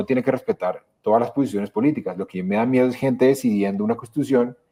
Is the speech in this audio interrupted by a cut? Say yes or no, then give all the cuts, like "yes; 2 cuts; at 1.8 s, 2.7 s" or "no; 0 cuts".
no; 0 cuts